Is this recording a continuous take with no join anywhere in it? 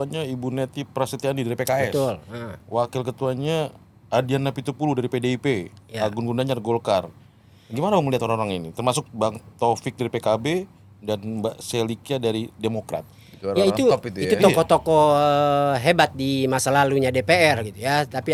yes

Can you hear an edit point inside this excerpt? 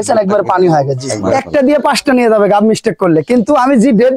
yes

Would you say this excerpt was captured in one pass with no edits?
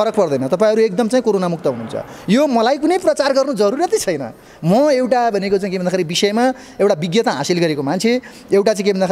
yes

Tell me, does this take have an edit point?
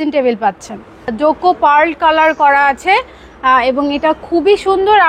yes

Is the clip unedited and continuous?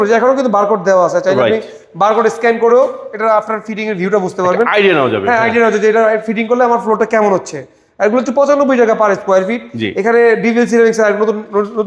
yes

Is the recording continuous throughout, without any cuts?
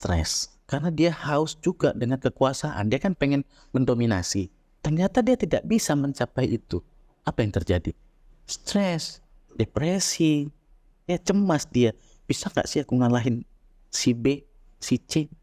yes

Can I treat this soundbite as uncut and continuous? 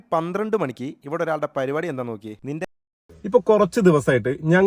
no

